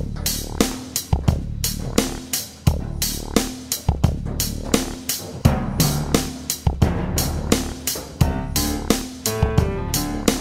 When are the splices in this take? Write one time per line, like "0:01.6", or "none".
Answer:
0:05.4